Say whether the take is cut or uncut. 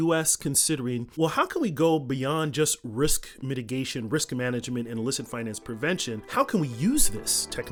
uncut